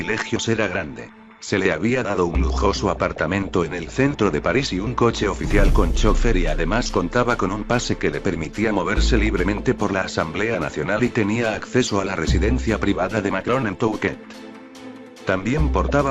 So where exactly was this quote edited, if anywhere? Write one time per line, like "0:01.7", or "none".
none